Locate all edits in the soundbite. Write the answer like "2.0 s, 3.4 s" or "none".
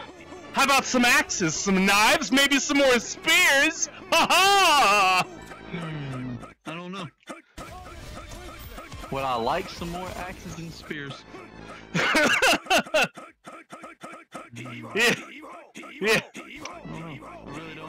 none